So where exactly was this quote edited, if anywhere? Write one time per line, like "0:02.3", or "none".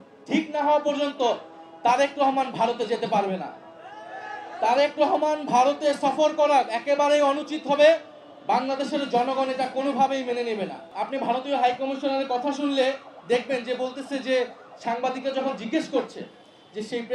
0:10.9